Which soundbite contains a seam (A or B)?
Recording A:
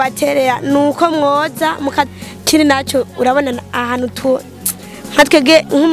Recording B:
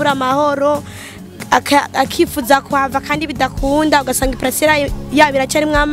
A